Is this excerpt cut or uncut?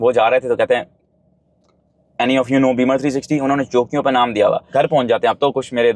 cut